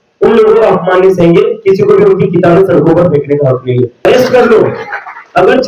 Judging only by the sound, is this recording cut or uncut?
cut